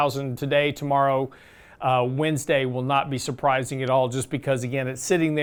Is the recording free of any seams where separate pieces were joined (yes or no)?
yes